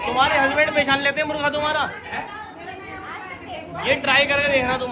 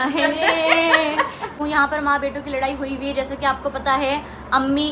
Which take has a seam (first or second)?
second